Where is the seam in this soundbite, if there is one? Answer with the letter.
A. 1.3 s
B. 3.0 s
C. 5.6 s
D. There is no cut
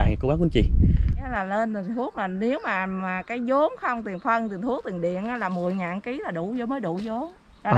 A